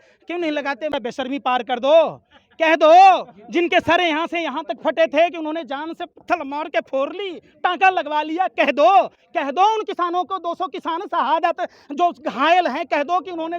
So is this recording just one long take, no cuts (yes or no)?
no